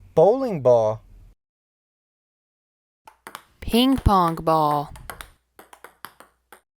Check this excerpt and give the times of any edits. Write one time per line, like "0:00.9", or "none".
0:04.9